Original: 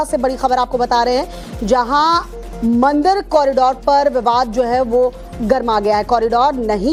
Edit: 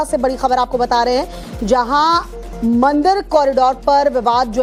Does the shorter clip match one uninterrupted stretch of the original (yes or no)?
yes